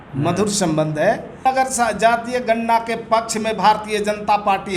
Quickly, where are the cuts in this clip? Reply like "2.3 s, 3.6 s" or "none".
1.4 s